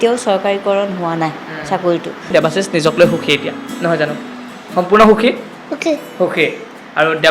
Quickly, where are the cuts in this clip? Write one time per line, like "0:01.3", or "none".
0:02.3